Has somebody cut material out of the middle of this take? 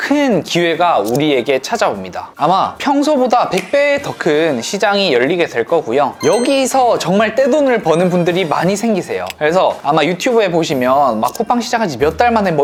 no; 0 cuts

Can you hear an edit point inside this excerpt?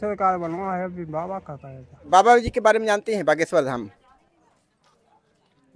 yes; 1 cut; at 2.1 s

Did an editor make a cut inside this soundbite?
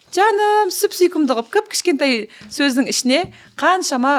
no; 0 cuts

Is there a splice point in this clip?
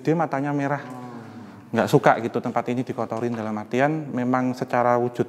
no; 0 cuts

